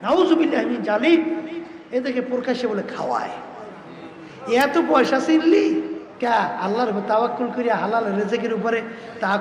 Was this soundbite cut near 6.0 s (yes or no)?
yes